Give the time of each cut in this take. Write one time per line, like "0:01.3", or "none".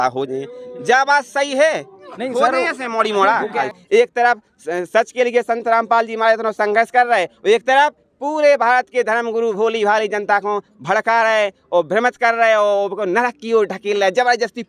0:03.6